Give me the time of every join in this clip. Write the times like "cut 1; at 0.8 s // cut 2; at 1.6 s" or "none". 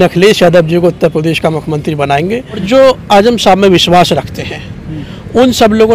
cut 1; at 2.6 s